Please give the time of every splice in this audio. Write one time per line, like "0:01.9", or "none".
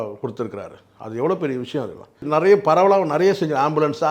0:02.2